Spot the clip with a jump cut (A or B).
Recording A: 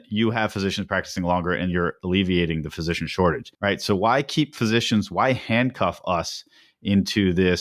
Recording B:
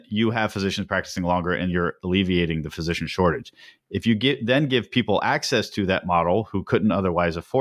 A